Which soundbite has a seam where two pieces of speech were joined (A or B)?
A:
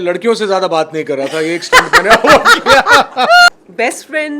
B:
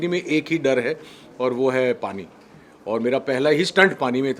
A